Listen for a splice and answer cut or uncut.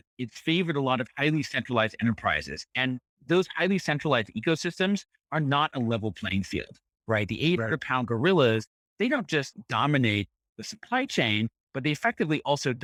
uncut